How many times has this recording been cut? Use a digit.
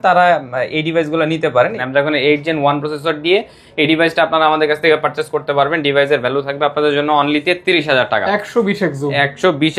1